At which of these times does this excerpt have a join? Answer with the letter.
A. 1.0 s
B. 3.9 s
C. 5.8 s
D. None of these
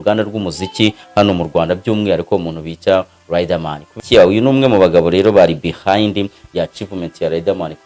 B